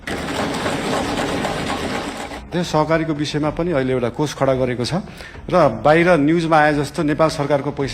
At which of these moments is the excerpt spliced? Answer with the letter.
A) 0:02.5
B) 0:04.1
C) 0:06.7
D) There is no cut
A